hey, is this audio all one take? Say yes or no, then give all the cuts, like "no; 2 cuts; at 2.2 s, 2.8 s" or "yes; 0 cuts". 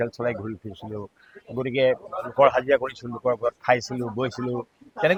yes; 0 cuts